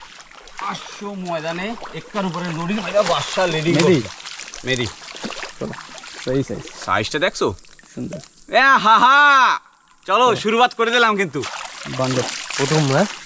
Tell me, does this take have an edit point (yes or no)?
no